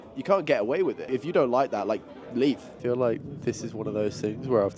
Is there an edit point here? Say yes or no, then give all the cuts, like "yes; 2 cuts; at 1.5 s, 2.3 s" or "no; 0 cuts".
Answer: yes; 2 cuts; at 1.0 s, 2.7 s